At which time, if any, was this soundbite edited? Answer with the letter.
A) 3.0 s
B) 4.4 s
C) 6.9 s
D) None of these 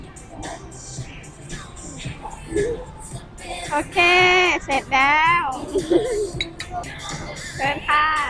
C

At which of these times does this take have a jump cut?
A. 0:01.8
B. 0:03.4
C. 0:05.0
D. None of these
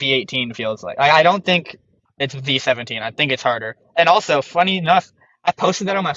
D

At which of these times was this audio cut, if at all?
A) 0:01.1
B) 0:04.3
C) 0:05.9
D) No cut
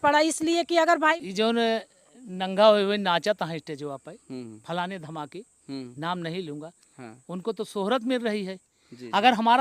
A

